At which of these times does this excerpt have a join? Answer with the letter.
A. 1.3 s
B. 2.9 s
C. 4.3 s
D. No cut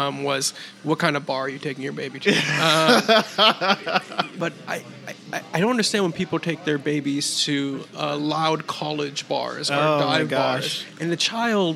C